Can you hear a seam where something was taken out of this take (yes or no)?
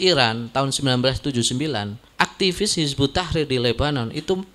yes